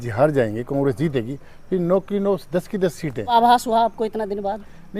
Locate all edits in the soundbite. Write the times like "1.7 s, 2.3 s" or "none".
3.3 s